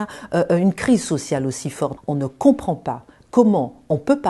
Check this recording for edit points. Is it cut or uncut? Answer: cut